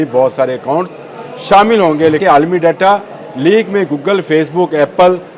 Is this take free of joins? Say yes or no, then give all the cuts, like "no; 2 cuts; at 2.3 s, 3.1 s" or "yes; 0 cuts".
no; 1 cut; at 2.2 s